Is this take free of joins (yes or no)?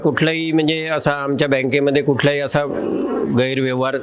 yes